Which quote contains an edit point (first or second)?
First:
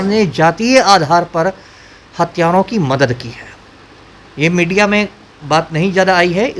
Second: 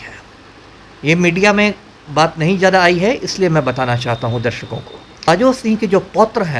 second